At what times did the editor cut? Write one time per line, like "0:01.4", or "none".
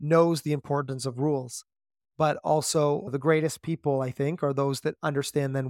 0:03.1